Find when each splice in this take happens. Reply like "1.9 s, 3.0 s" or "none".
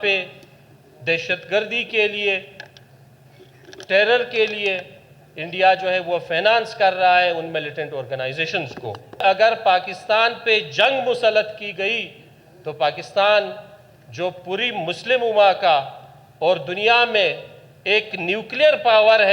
9.2 s